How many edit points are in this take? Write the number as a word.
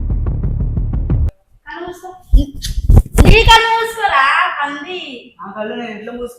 zero